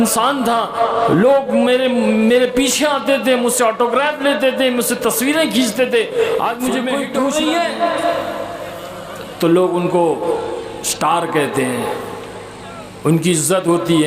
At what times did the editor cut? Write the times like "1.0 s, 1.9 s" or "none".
7.0 s